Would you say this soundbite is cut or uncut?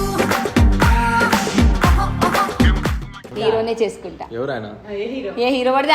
cut